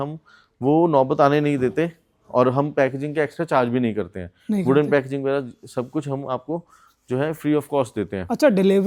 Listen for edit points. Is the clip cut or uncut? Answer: uncut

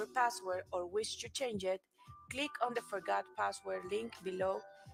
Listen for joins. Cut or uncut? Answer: uncut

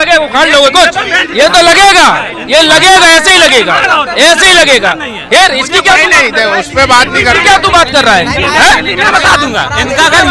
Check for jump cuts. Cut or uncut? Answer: uncut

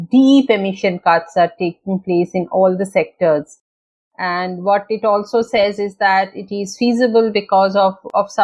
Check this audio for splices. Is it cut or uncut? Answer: uncut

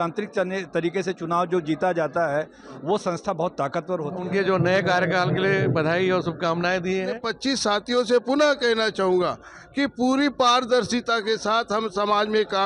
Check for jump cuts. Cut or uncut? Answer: cut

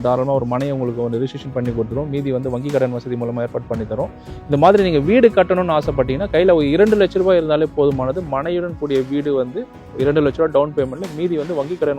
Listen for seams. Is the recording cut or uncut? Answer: uncut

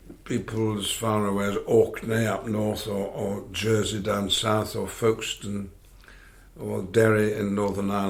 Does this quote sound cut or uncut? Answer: uncut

